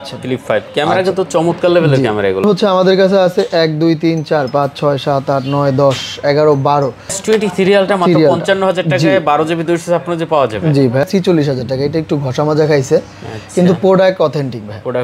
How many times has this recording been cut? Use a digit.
3